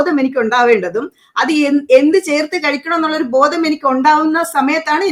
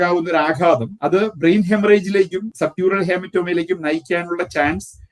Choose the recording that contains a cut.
second; 2 cuts; at 0.9 s, 2.4 s

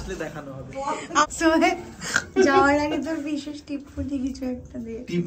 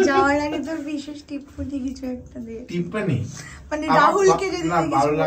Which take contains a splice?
first; 1 cut; at 1.3 s

